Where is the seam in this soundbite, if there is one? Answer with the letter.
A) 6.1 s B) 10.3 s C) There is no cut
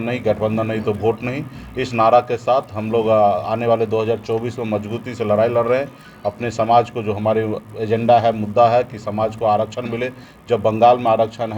C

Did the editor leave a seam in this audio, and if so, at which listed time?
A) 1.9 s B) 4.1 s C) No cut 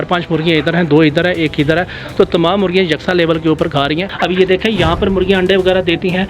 B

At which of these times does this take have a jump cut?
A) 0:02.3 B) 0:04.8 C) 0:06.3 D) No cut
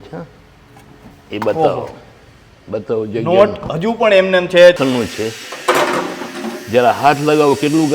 B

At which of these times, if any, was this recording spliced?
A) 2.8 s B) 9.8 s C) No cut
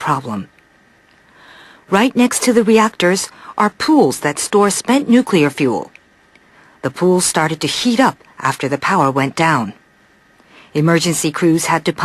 B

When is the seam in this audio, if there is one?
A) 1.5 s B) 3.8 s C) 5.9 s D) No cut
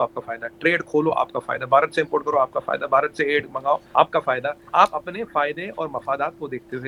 D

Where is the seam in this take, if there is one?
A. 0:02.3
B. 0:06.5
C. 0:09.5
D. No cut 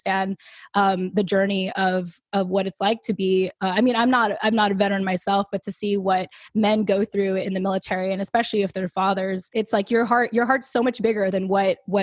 C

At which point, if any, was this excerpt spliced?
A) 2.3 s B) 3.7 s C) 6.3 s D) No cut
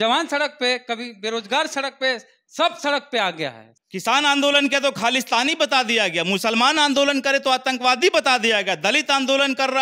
B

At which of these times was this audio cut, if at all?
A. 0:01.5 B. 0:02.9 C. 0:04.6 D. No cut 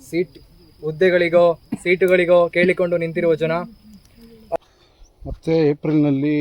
C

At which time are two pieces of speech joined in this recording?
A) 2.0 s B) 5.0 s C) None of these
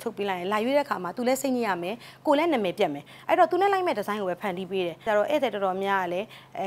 B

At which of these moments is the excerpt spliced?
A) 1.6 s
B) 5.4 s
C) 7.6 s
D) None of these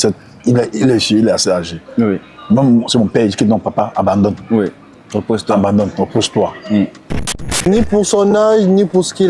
C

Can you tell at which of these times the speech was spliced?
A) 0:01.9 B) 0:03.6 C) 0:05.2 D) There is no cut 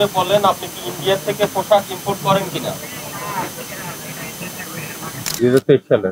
C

